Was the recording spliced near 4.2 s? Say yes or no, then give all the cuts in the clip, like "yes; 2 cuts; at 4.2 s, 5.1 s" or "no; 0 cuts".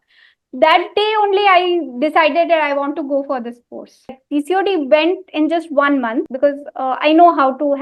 yes; 2 cuts; at 4.2 s, 6.3 s